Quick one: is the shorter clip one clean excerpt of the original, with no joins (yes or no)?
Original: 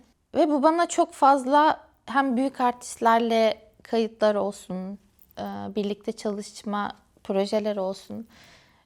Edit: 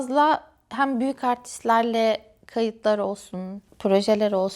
no